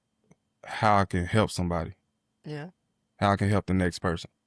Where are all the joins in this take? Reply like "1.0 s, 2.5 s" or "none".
none

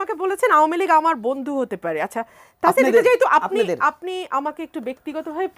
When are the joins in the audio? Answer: none

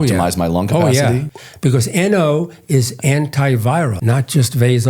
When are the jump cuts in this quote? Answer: 1.3 s, 4.0 s

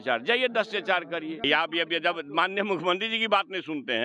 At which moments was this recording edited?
1.4 s

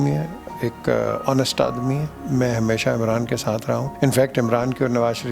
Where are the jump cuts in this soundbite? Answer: 2.1 s, 3.9 s

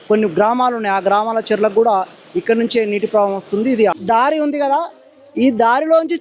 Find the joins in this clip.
3.9 s

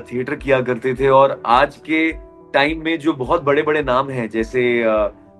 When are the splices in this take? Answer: none

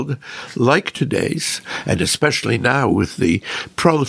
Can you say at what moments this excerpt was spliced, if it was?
none

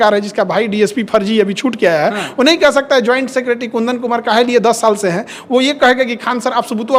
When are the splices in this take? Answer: none

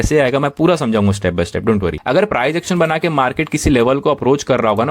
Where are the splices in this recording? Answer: 2.0 s

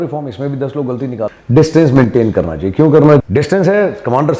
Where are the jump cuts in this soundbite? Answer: 1.3 s, 3.2 s

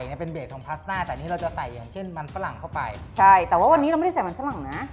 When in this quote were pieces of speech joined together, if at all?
none

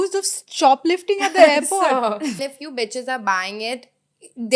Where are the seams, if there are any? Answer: 2.4 s

